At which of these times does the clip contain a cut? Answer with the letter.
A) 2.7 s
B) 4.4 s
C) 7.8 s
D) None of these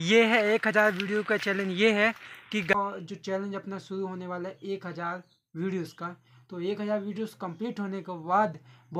A